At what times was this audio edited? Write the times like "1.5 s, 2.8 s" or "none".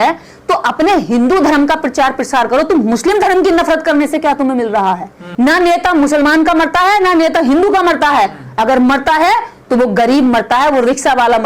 5.2 s